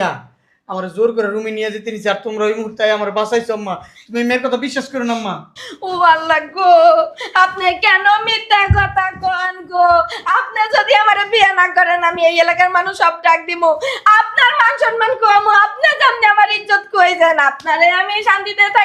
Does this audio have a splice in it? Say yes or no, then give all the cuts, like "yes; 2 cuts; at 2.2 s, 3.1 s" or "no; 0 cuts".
no; 0 cuts